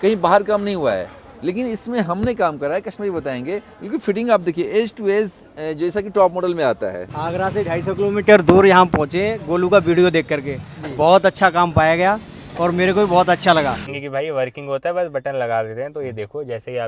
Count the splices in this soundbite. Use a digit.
2